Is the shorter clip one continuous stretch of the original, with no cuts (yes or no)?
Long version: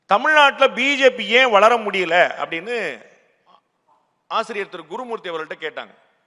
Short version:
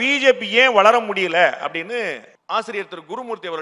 no